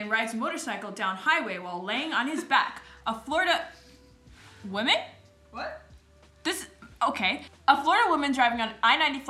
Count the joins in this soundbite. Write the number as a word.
zero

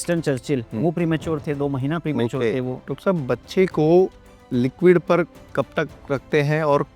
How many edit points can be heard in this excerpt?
one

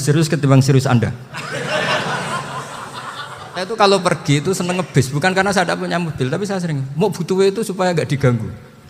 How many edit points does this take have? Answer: one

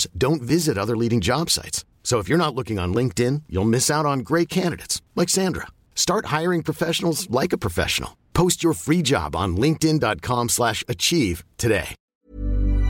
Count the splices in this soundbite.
one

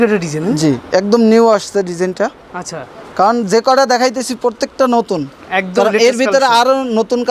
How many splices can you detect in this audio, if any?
zero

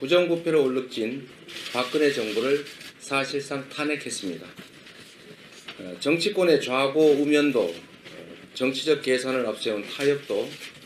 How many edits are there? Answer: zero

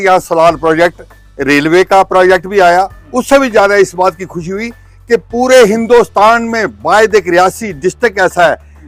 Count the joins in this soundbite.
zero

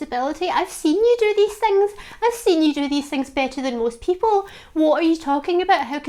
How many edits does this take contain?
zero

